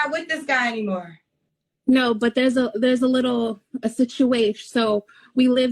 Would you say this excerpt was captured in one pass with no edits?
yes; 0 cuts

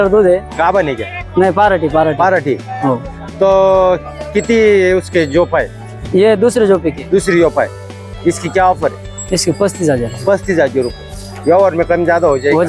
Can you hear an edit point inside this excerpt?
no; 0 cuts

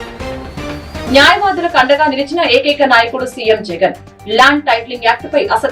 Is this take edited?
yes; 1 cut; at 1.0 s

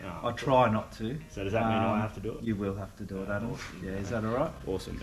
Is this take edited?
no; 0 cuts

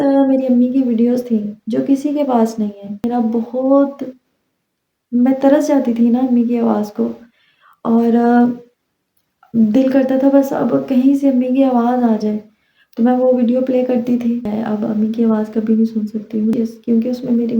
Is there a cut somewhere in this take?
yes; 3 cuts; at 3.0 s, 14.5 s, 16.5 s

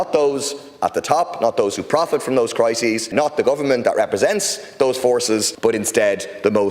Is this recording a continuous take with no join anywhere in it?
no; 2 cuts; at 3.1 s, 5.5 s

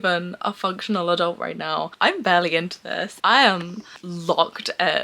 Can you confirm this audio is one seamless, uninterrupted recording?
yes; 0 cuts

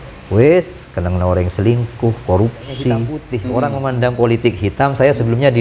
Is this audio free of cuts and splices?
no; 1 cut; at 3.5 s

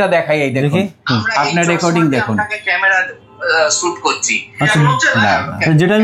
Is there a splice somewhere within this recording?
no; 0 cuts

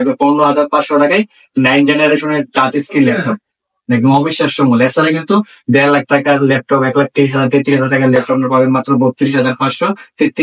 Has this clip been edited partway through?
no; 0 cuts

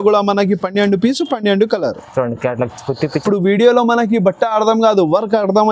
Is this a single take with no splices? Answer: no; 1 cut; at 3.2 s

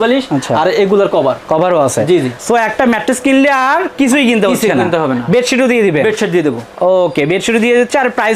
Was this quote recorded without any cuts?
yes; 0 cuts

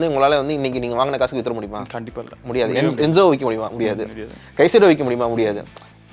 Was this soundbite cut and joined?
no; 0 cuts

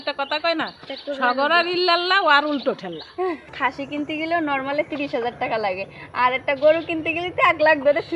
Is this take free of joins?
no; 1 cut; at 3.5 s

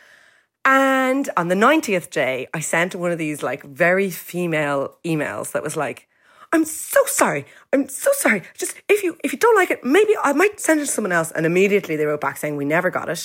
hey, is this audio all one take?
yes; 0 cuts

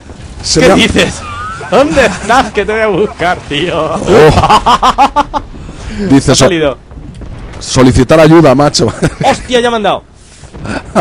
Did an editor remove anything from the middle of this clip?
no; 0 cuts

